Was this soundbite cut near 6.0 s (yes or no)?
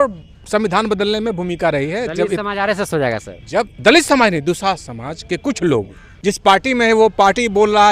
yes